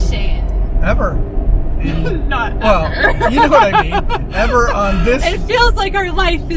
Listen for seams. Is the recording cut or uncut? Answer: uncut